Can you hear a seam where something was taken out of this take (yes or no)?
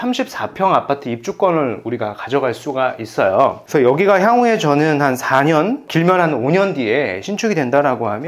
no